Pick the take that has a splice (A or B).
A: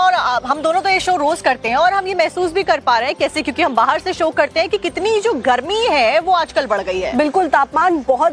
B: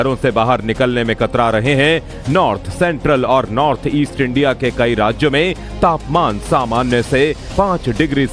B